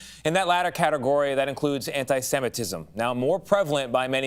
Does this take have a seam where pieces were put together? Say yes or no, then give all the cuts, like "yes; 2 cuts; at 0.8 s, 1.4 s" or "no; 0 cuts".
no; 0 cuts